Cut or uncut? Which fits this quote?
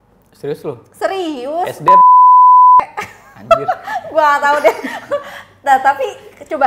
uncut